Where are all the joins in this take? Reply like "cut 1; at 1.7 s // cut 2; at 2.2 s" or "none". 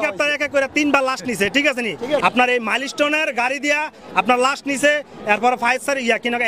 cut 1; at 2.2 s